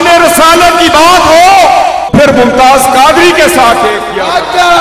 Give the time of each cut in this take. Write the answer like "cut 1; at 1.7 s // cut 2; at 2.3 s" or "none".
cut 1; at 2.1 s